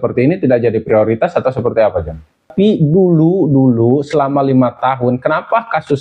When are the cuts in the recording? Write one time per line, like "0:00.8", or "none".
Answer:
0:02.5